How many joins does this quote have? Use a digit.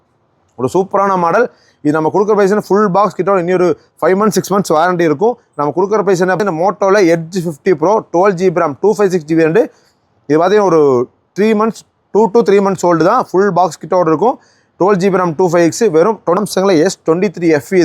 2